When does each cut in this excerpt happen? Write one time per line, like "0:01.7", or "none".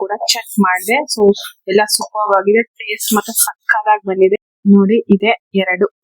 0:04.4